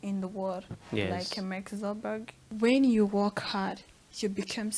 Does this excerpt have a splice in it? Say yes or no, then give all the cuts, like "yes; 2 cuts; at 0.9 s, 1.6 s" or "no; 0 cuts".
yes; 1 cut; at 2.5 s